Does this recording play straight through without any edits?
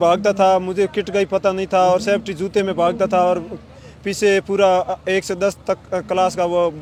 yes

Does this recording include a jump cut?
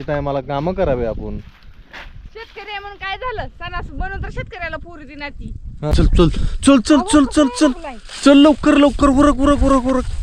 yes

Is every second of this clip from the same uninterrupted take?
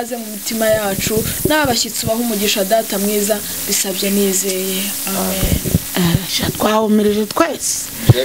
yes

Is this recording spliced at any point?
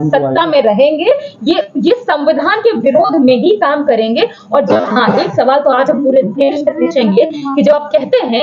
no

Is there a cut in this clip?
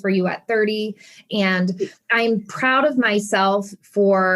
yes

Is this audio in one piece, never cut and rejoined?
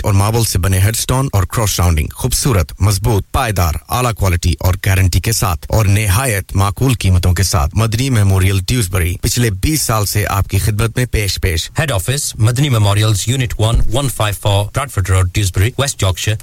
yes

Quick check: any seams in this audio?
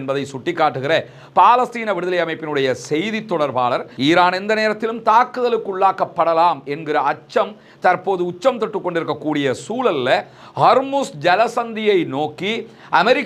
yes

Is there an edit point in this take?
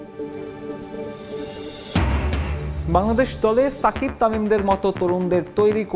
no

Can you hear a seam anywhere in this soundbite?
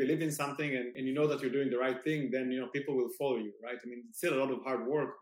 yes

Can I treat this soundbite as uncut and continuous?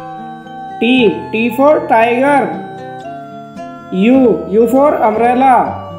no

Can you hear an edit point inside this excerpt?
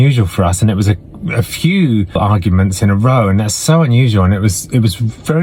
yes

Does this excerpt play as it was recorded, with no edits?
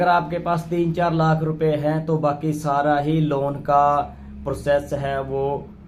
yes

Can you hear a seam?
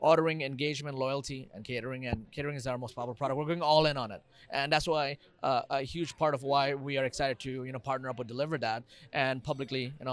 no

